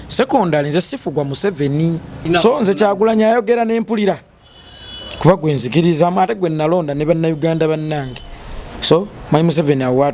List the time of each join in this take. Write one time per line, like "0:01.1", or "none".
0:02.2